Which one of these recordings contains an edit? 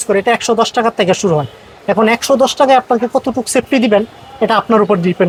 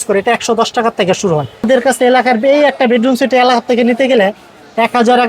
second; 1 cut; at 1.7 s

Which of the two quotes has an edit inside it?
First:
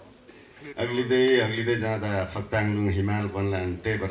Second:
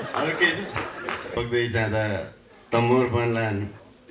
second; 1 cut; at 1.3 s

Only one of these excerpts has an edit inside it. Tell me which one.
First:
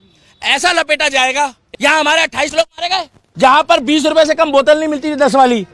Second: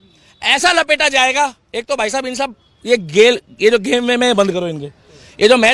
first; 2 cuts; at 1.6 s, 3.2 s

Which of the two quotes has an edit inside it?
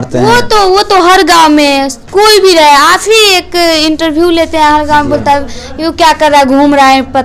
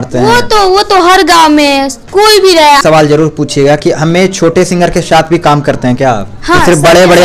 second; 1 cut; at 2.8 s

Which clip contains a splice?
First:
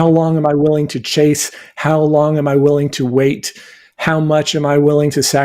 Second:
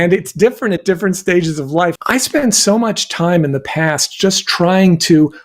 second; 1 cut; at 2.0 s

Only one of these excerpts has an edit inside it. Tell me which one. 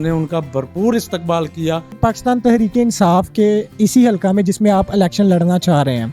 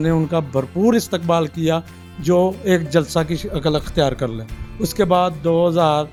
first; 1 cut; at 2.0 s

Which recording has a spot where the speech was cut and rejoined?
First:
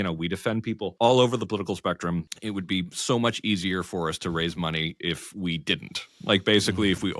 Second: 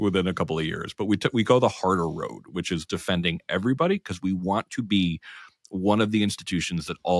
first; 2 cuts; at 0.9 s, 2.3 s

